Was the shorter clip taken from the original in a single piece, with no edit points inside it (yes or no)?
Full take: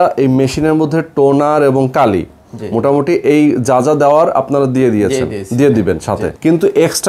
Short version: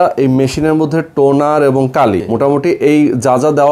no